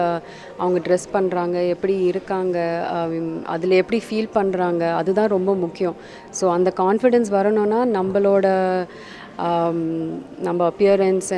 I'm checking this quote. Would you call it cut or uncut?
uncut